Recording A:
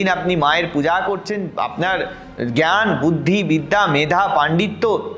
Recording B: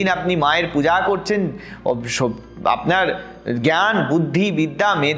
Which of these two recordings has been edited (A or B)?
A